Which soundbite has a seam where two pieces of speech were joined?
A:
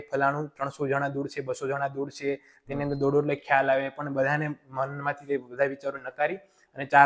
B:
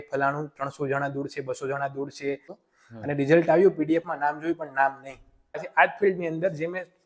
B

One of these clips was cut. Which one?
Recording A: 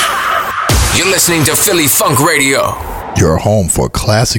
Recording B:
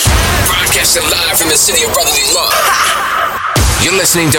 A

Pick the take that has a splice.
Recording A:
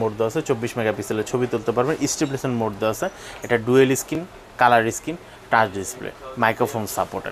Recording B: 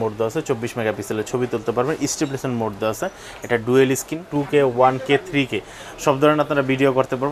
B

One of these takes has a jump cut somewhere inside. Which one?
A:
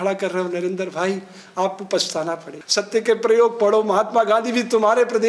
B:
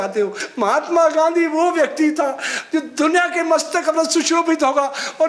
A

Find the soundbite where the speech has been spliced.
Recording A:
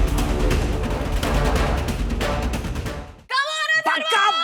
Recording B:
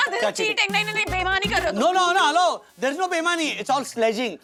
A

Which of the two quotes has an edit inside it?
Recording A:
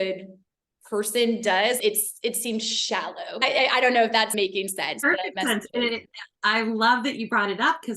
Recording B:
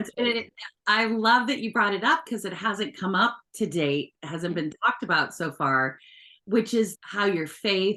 A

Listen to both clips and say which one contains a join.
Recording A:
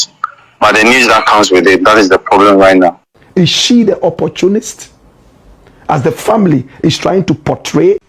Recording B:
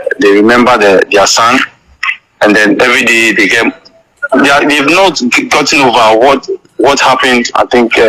A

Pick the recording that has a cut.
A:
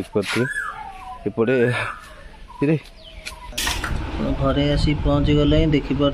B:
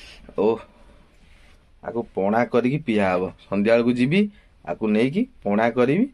A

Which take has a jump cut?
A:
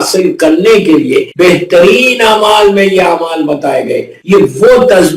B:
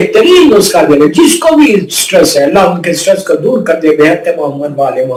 A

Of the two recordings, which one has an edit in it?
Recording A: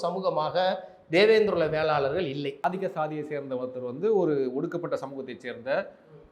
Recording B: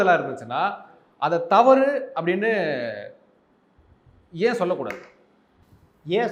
A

